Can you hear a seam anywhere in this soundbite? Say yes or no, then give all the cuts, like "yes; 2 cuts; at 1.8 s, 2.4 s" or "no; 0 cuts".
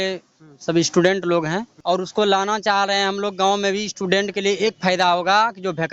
yes; 1 cut; at 1.7 s